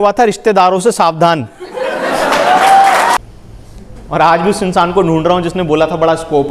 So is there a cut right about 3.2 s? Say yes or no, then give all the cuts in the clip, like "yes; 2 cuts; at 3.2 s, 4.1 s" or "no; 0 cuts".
yes; 1 cut; at 3.2 s